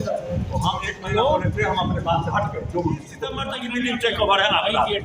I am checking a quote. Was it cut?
yes; 1 cut; at 3.5 s

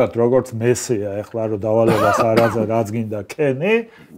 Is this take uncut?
yes; 0 cuts

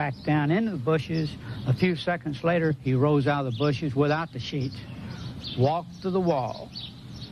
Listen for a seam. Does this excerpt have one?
no; 0 cuts

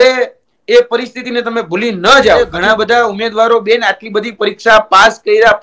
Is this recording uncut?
no; 1 cut; at 2.5 s

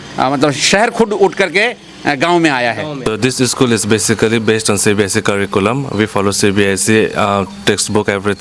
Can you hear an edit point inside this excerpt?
yes; 1 cut; at 2.9 s

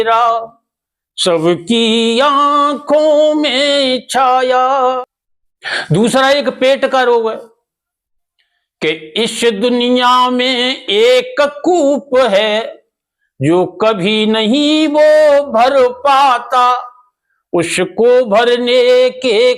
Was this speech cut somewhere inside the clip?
yes; 1 cut; at 5.0 s

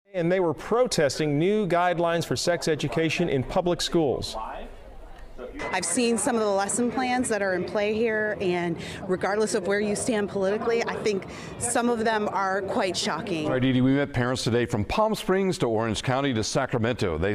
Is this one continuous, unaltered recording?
yes; 0 cuts

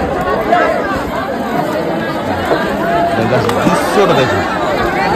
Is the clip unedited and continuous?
yes; 0 cuts

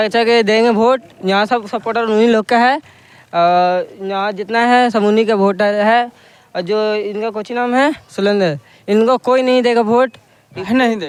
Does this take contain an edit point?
no; 0 cuts

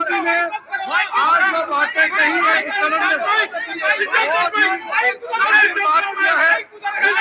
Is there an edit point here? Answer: no; 0 cuts

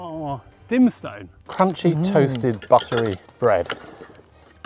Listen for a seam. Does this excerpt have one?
yes; 2 cuts; at 1.5 s, 3.3 s

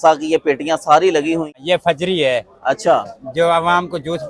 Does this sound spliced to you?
yes; 1 cut; at 1.5 s

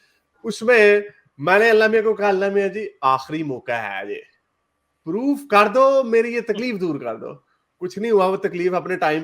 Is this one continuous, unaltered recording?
yes; 0 cuts

